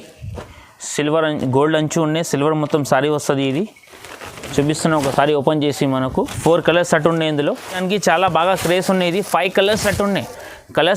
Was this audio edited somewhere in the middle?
yes; 1 cut; at 7.8 s

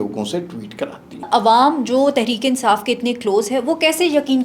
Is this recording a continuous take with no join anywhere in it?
no; 1 cut; at 1.3 s

